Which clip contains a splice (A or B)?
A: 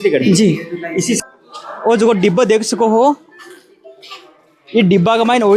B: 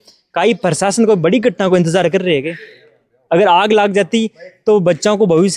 A